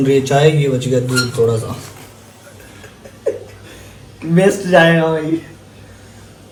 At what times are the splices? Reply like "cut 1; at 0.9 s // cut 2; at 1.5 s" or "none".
none